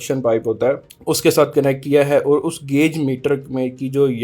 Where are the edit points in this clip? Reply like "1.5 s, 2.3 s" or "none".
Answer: 0.9 s